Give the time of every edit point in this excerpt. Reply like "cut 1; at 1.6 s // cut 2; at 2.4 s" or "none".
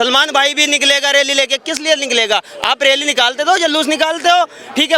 none

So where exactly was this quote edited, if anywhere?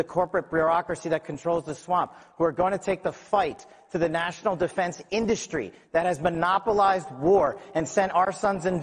cut 1; at 4.1 s

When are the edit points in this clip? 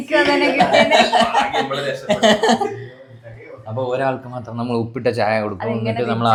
none

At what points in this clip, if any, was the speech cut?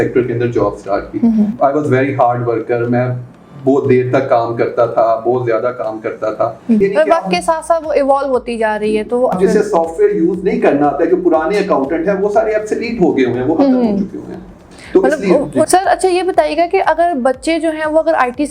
cut 1; at 1.5 s // cut 2; at 6.8 s // cut 3; at 9.3 s // cut 4; at 15.7 s

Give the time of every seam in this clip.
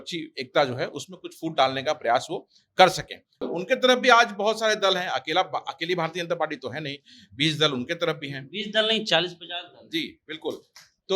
cut 1; at 3.5 s

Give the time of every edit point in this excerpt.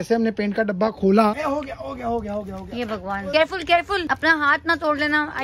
cut 1; at 1.3 s // cut 2; at 3.3 s // cut 3; at 4.0 s

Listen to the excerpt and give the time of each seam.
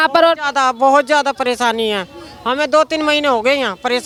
none

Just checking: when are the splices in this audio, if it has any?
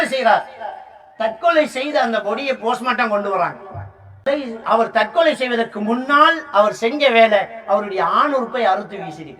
cut 1; at 4.3 s

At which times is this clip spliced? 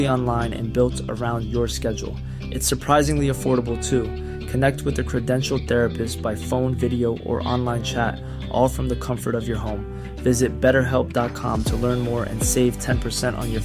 none

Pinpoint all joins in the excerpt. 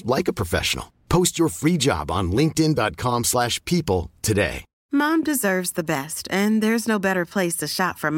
cut 1; at 4.7 s

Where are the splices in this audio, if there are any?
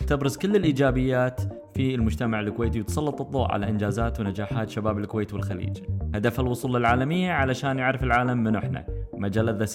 none

